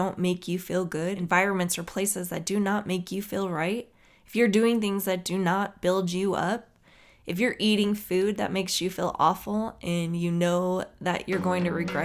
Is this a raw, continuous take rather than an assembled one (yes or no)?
no